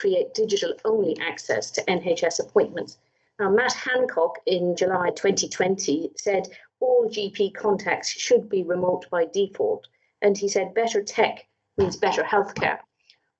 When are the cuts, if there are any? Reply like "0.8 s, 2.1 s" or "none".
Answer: 5.1 s